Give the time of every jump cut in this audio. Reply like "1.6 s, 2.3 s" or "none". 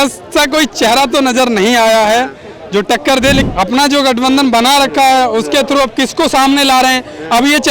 3.4 s